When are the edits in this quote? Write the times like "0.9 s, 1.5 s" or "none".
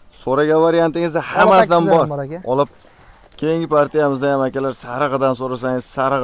2.7 s

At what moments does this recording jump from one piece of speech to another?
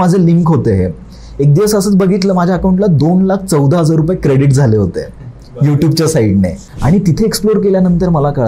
6.7 s

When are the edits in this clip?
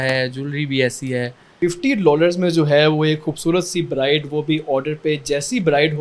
1.5 s

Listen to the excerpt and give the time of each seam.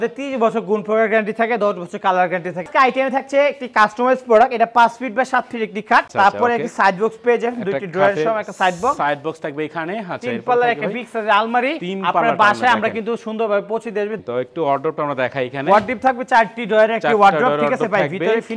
2.7 s, 6.1 s, 14.2 s

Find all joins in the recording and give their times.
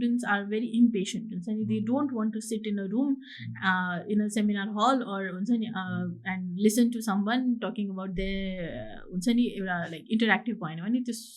none

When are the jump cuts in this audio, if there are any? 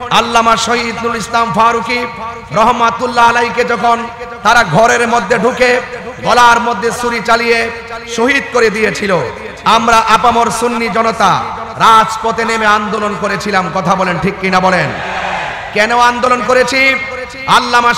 none

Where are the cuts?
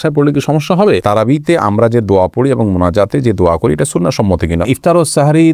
1.0 s, 4.6 s

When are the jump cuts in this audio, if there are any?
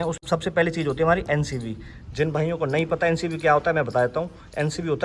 none

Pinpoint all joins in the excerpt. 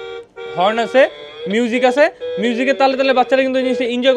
none

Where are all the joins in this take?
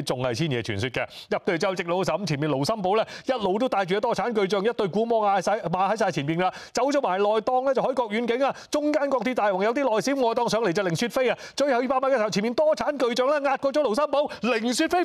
none

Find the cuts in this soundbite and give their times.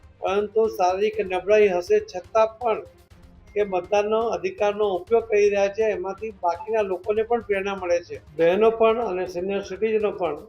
8.2 s

